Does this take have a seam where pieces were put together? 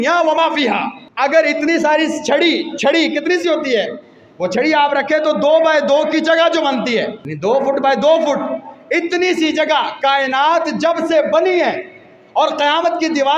yes; 2 cuts; at 1.0 s, 7.2 s

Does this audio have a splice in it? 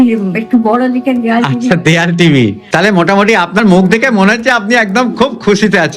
yes; 1 cut; at 2.6 s

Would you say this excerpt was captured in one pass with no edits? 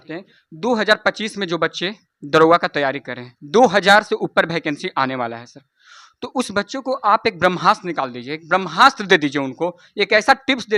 yes; 0 cuts

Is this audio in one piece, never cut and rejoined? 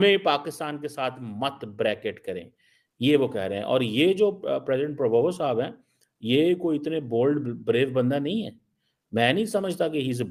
yes; 0 cuts

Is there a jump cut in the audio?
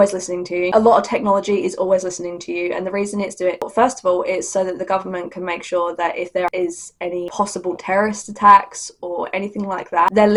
no; 0 cuts

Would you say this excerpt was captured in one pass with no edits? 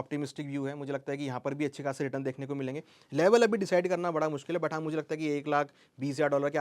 yes; 0 cuts

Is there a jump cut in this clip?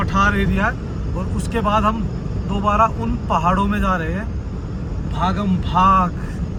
no; 0 cuts

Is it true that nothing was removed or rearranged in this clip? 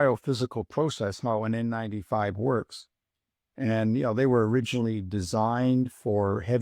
yes; 0 cuts

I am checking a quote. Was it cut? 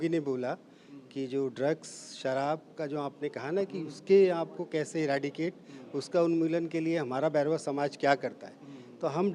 no; 0 cuts

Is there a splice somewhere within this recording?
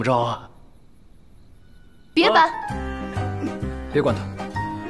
no; 0 cuts

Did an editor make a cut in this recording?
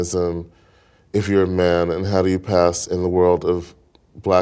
no; 0 cuts

